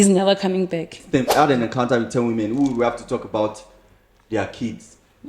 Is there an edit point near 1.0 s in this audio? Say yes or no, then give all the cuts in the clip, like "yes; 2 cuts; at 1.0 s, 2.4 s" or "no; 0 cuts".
yes; 1 cut; at 1.0 s